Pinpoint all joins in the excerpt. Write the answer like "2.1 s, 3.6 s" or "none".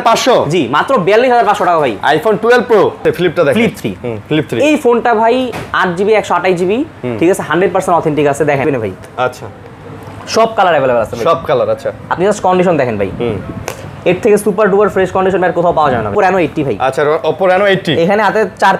3.0 s, 8.6 s, 16.1 s